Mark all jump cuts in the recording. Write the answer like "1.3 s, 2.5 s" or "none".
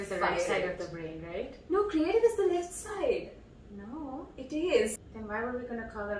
5.1 s